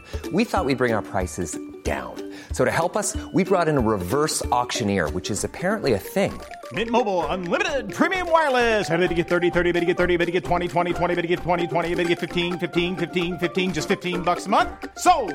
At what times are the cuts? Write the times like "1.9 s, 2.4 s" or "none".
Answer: none